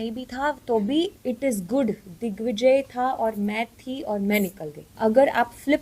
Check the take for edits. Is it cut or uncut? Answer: cut